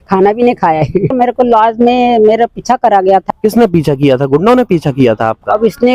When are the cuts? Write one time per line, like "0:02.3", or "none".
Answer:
0:01.1
0:03.2